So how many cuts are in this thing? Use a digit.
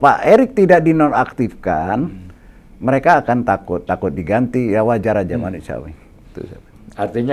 0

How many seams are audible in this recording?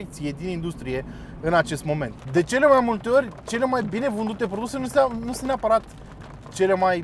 1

